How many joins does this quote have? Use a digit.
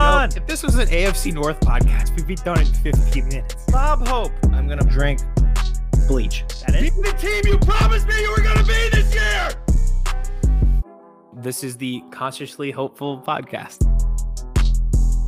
0